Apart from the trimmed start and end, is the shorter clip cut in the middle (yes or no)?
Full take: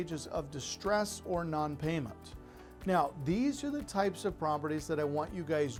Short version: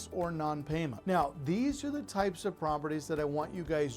yes